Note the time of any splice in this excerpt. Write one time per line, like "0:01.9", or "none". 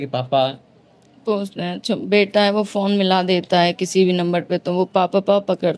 none